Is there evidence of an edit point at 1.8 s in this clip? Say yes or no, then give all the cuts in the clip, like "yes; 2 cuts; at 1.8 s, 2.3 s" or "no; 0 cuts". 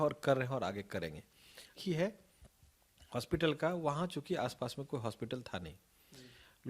yes; 1 cut; at 1.8 s